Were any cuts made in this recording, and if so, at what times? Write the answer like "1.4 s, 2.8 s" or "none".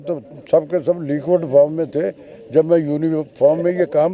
none